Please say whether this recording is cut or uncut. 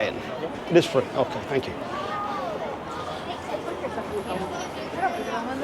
uncut